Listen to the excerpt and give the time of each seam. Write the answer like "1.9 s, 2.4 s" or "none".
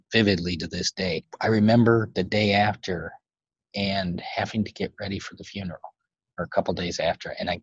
1.2 s